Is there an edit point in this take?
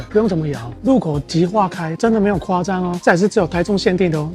yes; 2 cuts; at 1.9 s, 3.0 s

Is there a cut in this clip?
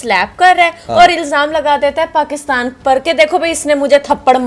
no; 0 cuts

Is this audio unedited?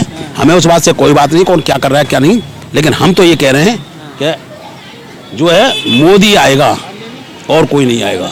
yes; 0 cuts

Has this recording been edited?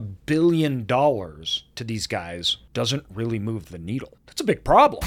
yes; 2 cuts; at 2.6 s, 4.2 s

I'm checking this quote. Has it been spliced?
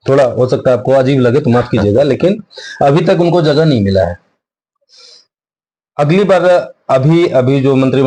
no; 0 cuts

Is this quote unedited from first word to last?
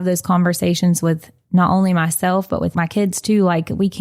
no; 1 cut; at 2.7 s

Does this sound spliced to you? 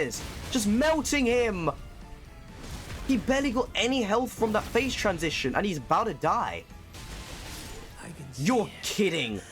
no; 0 cuts

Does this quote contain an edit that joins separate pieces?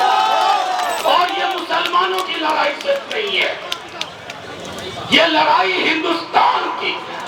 yes; 1 cut; at 1.0 s

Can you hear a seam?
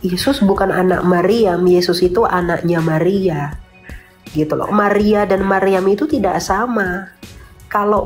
no; 0 cuts

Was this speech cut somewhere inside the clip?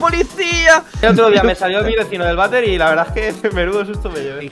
yes; 1 cut; at 1.0 s

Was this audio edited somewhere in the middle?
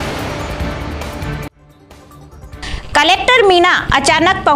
yes; 1 cut; at 2.4 s

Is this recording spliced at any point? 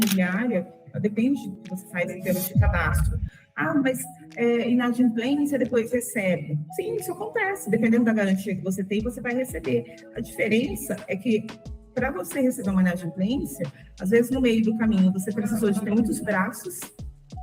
yes; 2 cuts; at 1.6 s, 6.7 s

